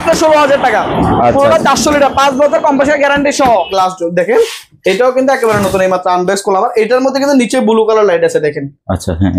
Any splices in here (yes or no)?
yes